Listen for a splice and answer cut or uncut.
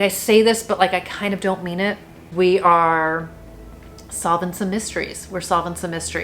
cut